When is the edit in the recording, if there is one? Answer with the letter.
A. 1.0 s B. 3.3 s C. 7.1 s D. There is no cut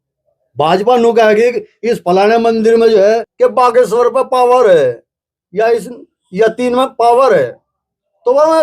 B